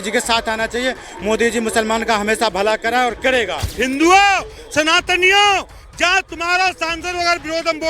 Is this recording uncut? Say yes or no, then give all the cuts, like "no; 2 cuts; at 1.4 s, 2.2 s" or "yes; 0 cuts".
no; 1 cut; at 3.7 s